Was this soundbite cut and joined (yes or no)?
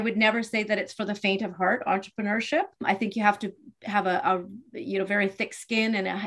yes